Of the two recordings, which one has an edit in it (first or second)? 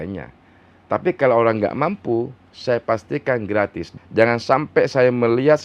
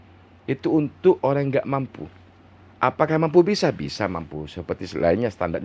first